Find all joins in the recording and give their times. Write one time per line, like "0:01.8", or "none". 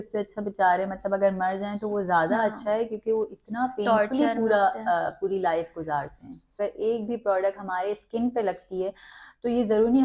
0:06.6